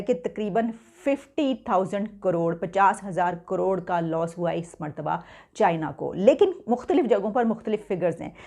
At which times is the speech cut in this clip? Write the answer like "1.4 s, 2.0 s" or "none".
none